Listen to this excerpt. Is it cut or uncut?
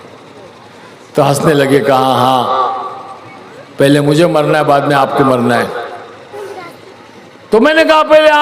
cut